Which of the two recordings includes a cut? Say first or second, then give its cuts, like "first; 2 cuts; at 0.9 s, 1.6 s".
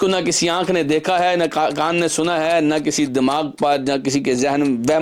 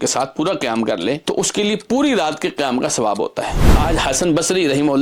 second; 2 cuts; at 1.2 s, 3.8 s